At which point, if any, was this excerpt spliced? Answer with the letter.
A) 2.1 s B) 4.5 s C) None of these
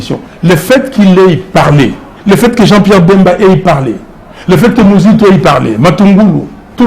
A